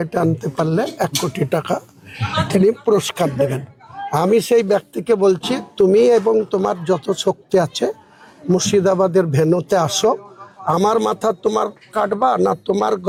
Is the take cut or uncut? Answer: uncut